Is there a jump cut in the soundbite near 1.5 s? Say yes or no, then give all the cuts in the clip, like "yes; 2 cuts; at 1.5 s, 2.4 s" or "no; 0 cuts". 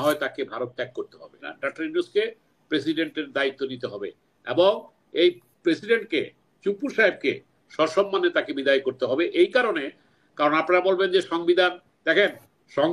yes; 1 cut; at 1.5 s